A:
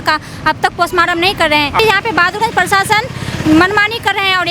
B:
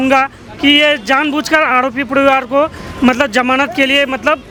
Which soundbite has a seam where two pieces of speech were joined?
A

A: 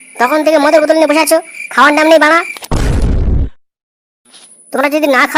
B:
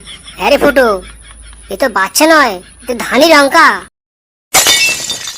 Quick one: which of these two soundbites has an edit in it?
B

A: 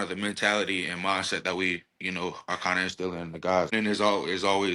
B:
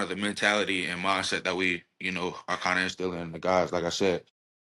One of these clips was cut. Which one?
A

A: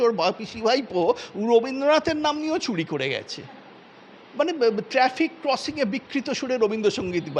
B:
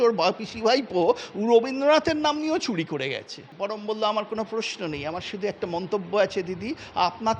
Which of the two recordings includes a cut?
B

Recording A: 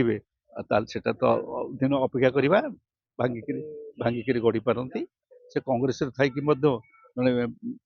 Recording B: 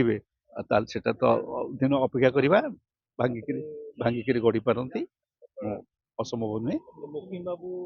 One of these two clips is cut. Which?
A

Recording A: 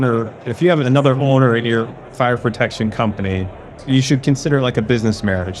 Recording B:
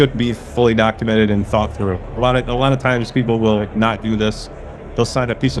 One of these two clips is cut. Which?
A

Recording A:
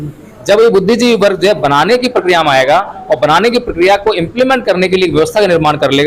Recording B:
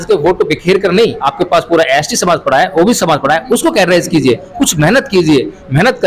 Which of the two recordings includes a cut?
B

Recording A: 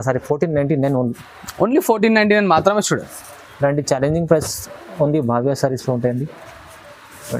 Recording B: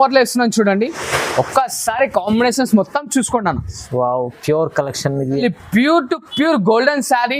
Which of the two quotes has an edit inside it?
B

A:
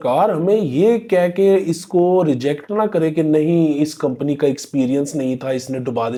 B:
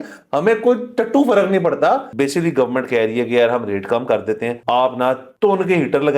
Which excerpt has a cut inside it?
B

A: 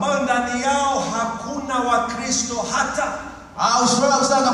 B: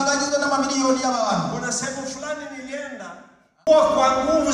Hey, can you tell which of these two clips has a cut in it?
B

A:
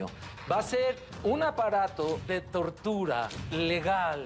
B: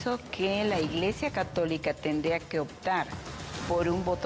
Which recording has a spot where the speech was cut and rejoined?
A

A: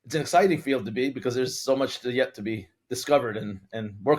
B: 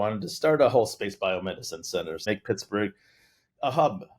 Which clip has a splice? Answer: B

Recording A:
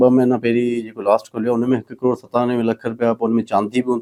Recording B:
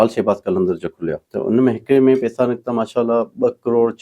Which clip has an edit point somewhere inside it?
B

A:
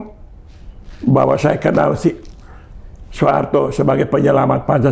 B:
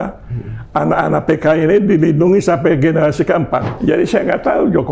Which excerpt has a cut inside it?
B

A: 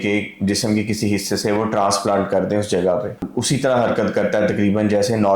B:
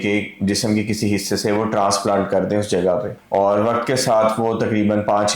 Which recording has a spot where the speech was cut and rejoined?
A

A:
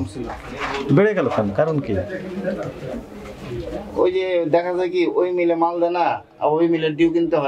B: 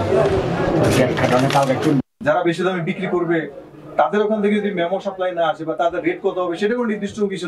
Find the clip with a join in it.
B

